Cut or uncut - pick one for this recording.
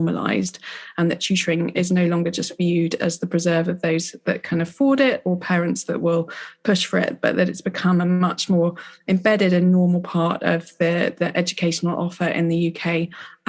uncut